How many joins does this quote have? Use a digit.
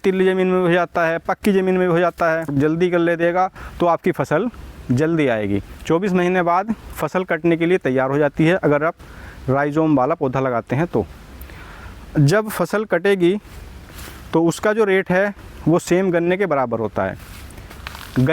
2